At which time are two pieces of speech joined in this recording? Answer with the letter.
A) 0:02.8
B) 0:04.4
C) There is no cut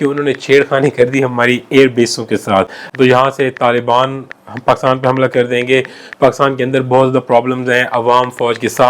A